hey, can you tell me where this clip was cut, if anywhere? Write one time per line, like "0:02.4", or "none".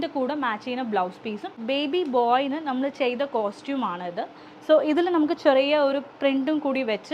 0:01.6